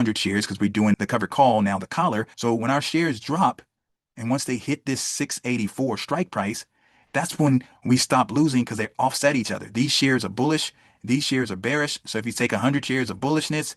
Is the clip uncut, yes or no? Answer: no